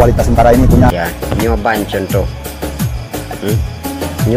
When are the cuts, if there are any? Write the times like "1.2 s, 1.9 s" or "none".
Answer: 0.9 s